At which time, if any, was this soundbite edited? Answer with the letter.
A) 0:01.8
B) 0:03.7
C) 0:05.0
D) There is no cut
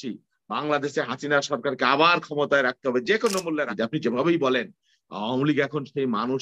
B